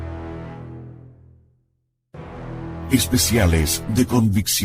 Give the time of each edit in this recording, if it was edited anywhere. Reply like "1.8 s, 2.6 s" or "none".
2.9 s